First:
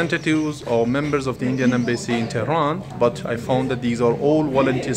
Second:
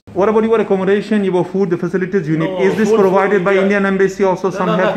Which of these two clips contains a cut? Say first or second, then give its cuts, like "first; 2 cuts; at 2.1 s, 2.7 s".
first; 1 cut; at 2.9 s